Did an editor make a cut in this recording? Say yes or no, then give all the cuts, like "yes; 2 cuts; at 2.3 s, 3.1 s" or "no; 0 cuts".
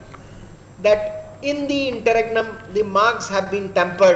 no; 0 cuts